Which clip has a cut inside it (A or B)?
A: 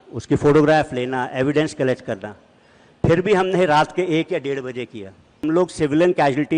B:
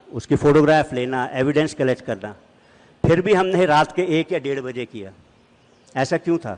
A